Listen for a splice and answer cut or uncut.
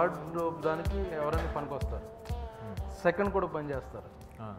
uncut